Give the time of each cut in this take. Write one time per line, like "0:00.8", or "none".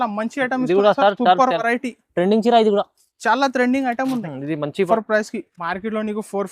0:04.9